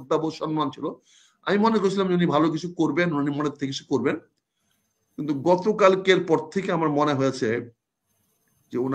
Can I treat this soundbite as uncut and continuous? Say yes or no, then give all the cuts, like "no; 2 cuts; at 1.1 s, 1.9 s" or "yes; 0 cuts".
yes; 0 cuts